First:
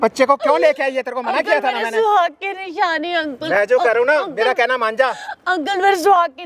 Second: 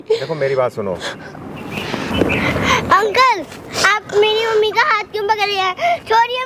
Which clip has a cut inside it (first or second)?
second